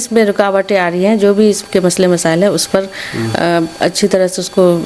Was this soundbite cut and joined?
no; 0 cuts

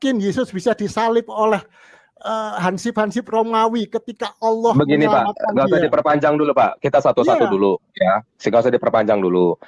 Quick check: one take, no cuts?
yes; 0 cuts

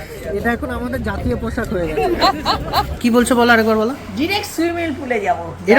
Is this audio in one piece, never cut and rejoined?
no; 1 cut; at 2.9 s

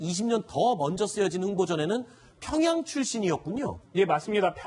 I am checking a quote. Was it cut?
no; 0 cuts

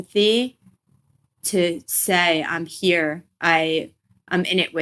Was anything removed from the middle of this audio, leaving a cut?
yes; 1 cut; at 1.3 s

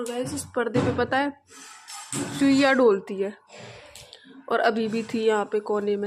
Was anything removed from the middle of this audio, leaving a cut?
no; 0 cuts

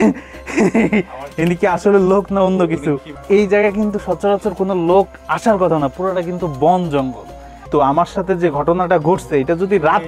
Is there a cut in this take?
yes; 2 cuts; at 3.1 s, 7.7 s

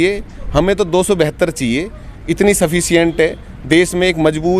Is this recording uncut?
yes; 0 cuts

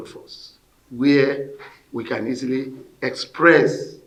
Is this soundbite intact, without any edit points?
yes; 0 cuts

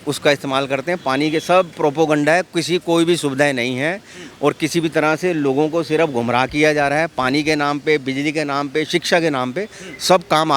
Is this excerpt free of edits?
yes; 0 cuts

